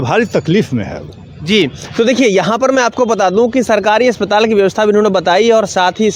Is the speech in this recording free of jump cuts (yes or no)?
yes